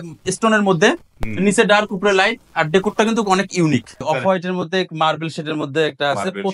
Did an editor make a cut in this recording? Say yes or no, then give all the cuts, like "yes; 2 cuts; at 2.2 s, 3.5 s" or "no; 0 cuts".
yes; 1 cut; at 4.0 s